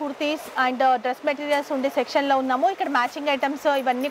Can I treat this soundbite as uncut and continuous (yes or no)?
yes